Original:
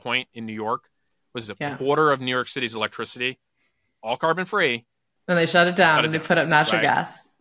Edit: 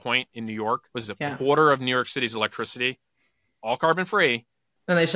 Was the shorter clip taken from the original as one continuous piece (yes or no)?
no